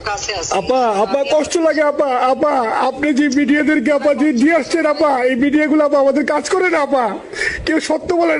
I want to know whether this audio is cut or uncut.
uncut